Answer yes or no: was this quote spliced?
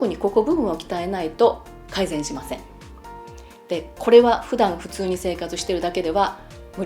no